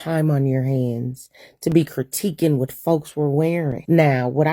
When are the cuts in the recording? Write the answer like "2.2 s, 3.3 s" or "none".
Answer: none